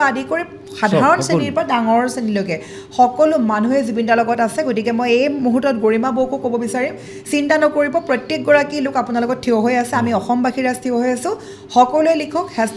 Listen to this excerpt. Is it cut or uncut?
uncut